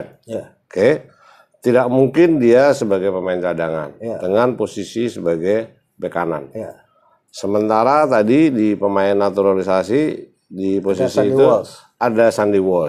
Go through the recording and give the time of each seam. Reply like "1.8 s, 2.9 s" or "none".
none